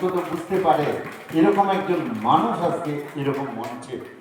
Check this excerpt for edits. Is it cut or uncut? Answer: uncut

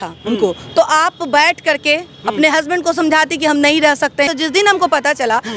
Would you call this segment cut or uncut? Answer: cut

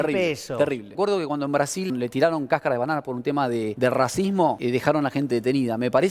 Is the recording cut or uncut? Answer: cut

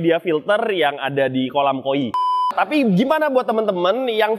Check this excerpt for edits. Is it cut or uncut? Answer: cut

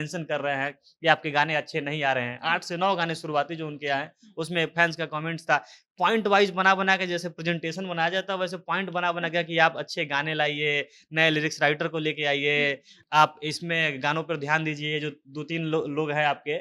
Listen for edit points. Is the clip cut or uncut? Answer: uncut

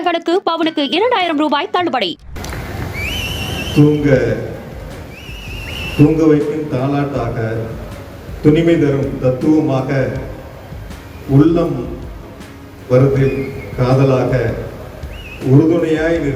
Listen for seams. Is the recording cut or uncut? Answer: cut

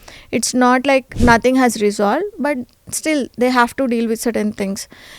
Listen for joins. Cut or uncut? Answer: cut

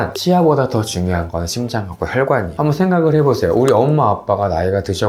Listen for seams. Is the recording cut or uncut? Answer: cut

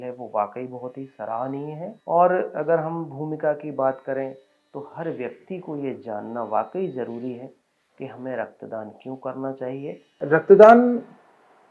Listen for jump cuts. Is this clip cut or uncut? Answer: cut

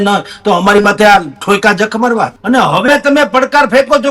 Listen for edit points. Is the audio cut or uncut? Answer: cut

